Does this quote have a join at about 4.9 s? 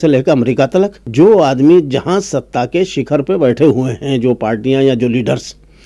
no; 1 cut; at 1.0 s

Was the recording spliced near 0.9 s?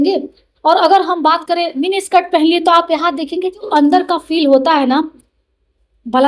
no; 1 cut; at 3.7 s

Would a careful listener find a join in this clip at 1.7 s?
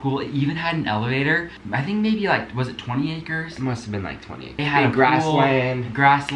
yes; 2 cuts; at 1.7 s, 4.4 s

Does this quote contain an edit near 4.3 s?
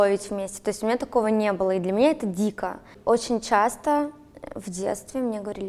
no; 1 cut; at 2.9 s

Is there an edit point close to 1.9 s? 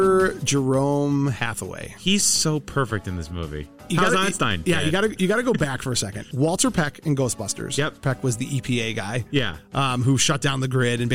no; 3 cuts; at 3.7 s, 6.2 s, 8.0 s

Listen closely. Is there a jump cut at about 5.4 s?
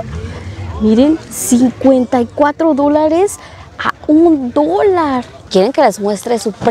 yes; 1 cut; at 5.4 s

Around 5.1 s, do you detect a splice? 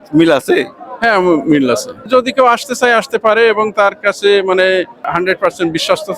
yes; 2 cuts; at 2.1 s, 5.1 s

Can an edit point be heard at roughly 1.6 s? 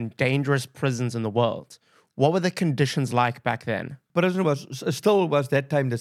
no; 1 cut; at 4.0 s

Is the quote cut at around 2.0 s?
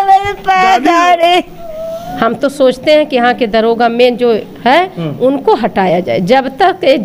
yes; 1 cut; at 2.0 s

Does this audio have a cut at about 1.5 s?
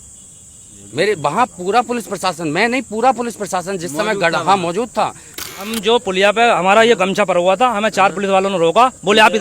no; 1 cut; at 5.6 s

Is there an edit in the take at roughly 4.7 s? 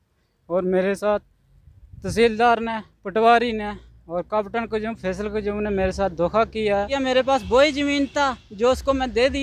no; 1 cut; at 6.9 s

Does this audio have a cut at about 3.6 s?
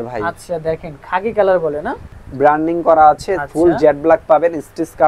no; 1 cut; at 2.0 s

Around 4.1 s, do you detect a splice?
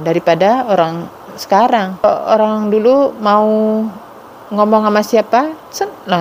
no; 1 cut; at 2.0 s

